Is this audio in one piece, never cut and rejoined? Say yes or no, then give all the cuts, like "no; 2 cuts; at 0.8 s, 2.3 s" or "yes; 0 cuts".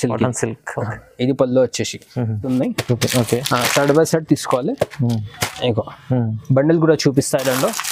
no; 1 cut; at 2.4 s